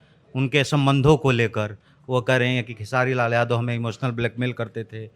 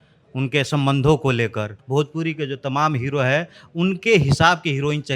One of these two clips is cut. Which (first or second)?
second